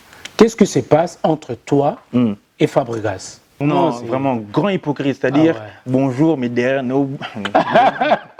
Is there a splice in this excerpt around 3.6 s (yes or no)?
yes